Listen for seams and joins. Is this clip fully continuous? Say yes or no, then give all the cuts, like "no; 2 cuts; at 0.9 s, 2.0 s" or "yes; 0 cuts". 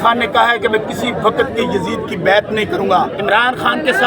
no; 1 cut; at 2.8 s